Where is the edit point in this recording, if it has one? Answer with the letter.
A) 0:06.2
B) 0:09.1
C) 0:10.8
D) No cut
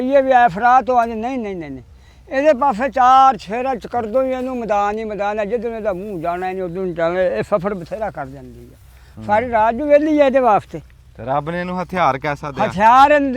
D